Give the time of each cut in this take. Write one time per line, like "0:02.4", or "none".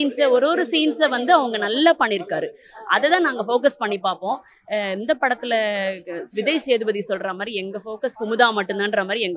none